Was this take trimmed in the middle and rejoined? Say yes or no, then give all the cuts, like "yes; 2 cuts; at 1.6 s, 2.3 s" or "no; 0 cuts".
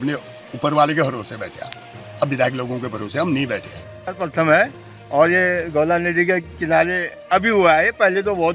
no; 0 cuts